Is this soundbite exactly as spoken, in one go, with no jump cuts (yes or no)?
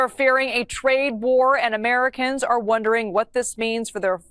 yes